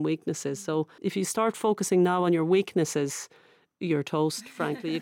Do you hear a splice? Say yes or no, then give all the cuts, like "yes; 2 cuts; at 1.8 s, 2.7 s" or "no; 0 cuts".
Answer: yes; 1 cut; at 0.9 s